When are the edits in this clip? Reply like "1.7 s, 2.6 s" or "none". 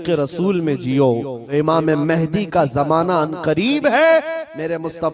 1.4 s